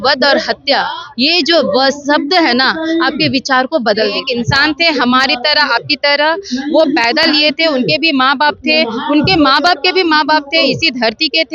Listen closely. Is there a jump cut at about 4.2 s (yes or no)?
yes